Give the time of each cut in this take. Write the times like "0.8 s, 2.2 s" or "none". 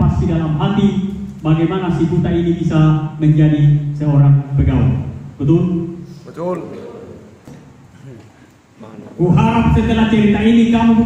7.5 s

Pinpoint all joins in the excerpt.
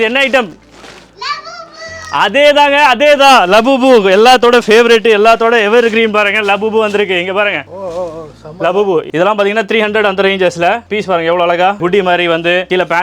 9.1 s, 11.8 s

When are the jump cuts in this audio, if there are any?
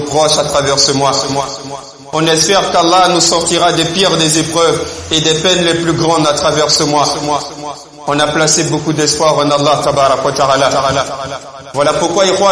11.6 s

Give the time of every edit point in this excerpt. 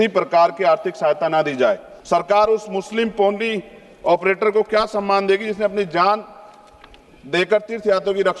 1.9 s

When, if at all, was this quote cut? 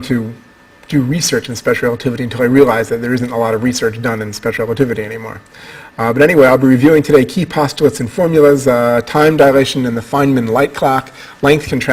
none

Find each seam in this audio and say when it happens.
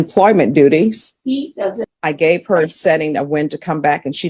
1.9 s

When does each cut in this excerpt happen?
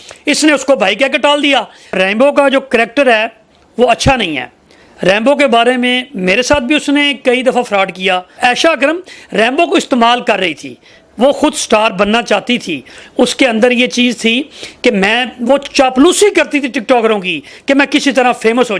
1.9 s, 8.3 s

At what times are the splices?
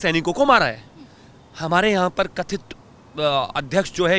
none

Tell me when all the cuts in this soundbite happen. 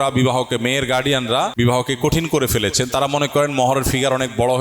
1.5 s

